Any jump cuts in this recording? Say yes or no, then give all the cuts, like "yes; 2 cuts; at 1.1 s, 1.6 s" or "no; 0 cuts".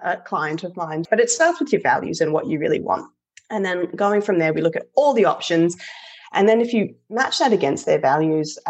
yes; 1 cut; at 1.0 s